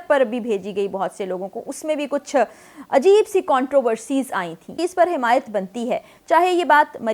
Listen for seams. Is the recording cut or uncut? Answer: cut